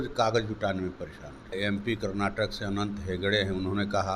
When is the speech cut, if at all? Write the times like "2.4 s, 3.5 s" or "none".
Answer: 1.5 s